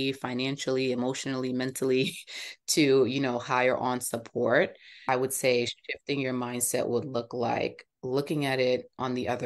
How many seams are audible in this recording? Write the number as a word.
one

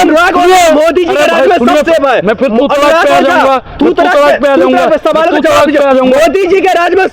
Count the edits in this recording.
zero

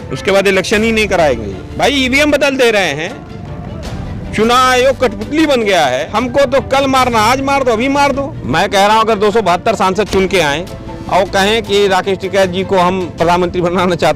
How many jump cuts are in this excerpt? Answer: three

